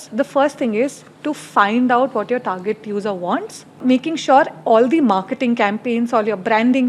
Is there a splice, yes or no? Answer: yes